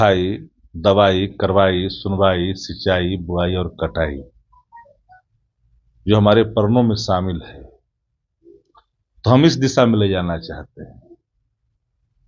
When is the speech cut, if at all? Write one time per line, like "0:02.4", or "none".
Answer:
none